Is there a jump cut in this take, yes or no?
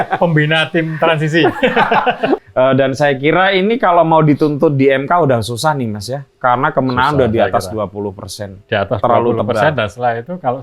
yes